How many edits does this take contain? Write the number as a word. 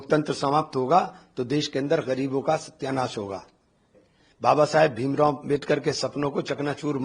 one